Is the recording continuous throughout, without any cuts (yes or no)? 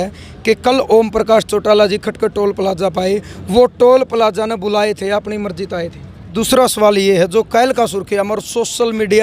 no